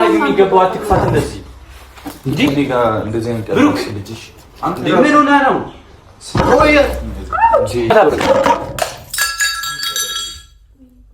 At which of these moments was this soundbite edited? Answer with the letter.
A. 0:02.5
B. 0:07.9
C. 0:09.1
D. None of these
B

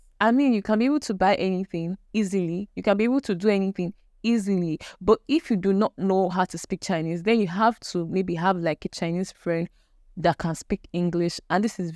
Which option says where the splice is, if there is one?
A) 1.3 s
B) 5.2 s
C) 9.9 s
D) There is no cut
D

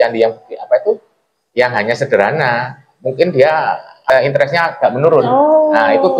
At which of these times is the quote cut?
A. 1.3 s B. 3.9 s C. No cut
B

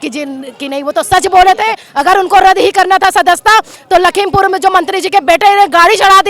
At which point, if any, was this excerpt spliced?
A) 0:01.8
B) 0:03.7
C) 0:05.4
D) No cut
A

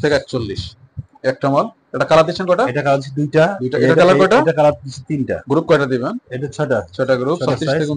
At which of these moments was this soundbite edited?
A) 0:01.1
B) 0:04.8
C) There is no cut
A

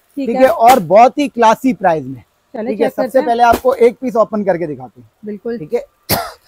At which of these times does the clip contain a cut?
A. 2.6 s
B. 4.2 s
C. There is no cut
C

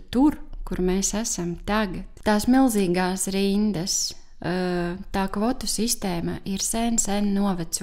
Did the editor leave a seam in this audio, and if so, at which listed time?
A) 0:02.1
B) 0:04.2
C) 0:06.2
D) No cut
A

